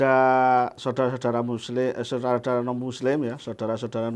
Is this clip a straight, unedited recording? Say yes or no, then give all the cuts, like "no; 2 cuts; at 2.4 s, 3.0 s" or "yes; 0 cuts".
yes; 0 cuts